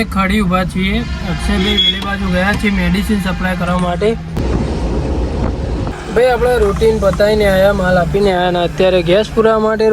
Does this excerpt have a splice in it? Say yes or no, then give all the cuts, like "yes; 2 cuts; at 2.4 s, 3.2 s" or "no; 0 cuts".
yes; 2 cuts; at 4.3 s, 6.0 s